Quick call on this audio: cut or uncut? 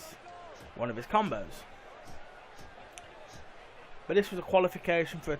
cut